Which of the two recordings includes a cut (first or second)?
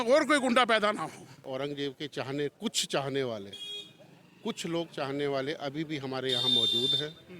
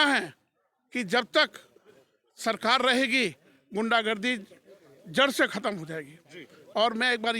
first